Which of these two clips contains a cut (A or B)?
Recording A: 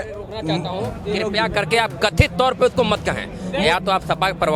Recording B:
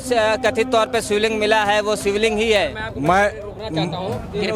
A